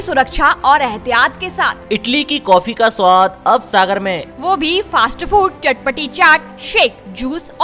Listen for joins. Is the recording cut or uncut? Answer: uncut